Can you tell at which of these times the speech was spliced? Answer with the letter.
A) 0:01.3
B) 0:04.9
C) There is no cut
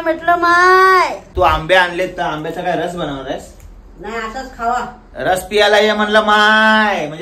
A